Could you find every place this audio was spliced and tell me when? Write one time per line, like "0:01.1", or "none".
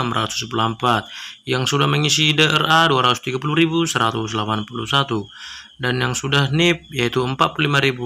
none